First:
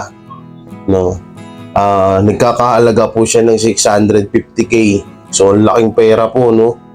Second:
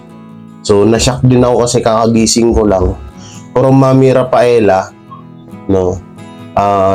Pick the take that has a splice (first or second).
first